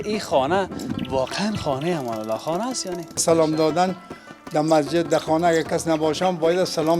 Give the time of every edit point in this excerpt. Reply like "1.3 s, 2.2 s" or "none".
3.2 s